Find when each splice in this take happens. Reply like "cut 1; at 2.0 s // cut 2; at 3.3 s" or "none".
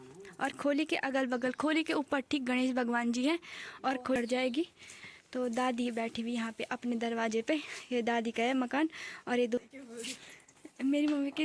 cut 1; at 4.2 s // cut 2; at 9.6 s